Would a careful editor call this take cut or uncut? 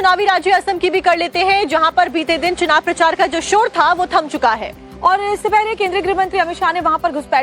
cut